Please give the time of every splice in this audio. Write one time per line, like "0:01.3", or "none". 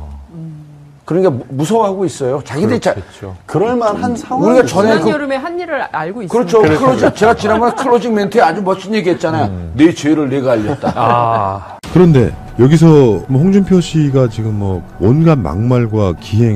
0:09.7